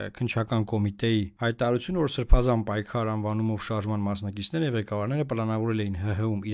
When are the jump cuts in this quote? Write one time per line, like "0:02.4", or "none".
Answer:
0:01.3